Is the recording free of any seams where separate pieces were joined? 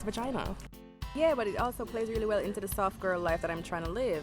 no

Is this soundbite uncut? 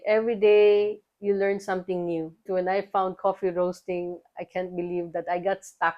no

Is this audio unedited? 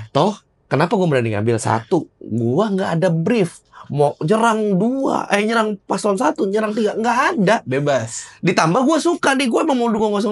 yes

